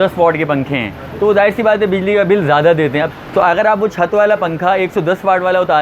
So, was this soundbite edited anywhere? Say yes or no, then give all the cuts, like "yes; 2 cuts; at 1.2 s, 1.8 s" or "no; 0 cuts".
yes; 1 cut; at 3.2 s